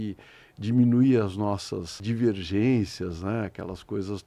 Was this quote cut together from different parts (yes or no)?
yes